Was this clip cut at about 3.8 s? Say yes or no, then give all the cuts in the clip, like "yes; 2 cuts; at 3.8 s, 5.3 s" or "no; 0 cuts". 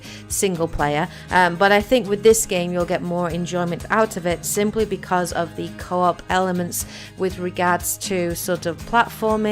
no; 1 cut; at 5.1 s